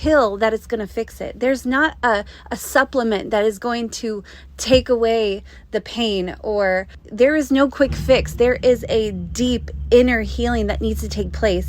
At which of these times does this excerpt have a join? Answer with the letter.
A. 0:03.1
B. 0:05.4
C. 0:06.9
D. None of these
C